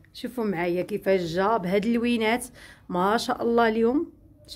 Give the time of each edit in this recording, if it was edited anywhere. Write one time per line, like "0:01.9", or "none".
none